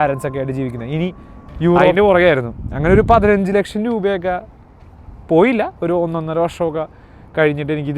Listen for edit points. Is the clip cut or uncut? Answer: cut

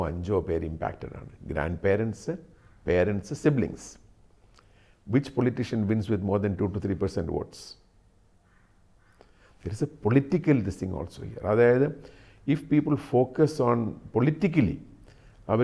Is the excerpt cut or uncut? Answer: uncut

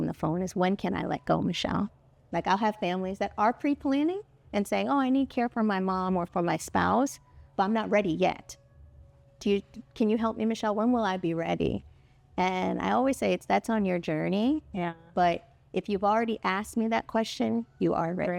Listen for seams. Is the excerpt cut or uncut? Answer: uncut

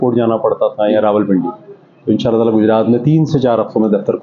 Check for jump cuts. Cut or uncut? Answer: uncut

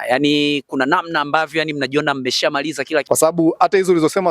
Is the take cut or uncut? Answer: cut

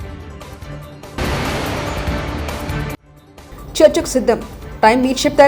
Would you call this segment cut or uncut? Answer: cut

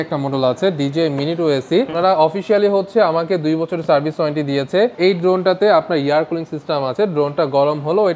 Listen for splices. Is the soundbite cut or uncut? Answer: cut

